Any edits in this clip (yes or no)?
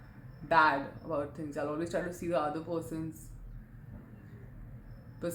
no